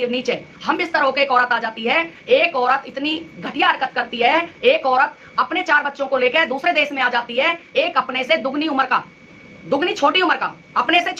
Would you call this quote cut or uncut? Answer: uncut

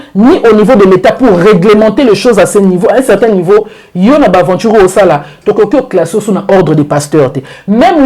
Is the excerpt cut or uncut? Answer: uncut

